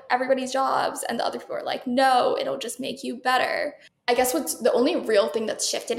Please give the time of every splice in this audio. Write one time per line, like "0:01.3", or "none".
0:03.9